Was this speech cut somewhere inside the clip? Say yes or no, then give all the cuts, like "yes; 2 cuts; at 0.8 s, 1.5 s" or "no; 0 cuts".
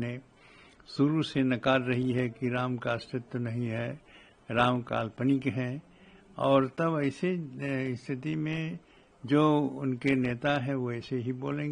no; 0 cuts